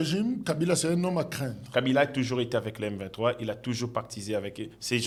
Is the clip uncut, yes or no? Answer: yes